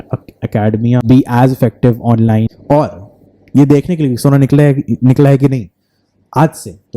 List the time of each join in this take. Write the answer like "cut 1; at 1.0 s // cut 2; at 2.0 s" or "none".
cut 1; at 1.0 s // cut 2; at 2.5 s